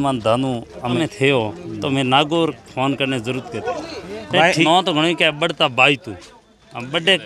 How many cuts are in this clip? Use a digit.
2